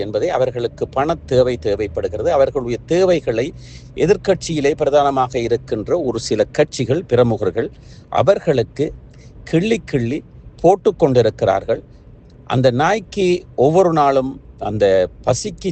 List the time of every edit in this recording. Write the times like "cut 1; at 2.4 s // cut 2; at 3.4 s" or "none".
none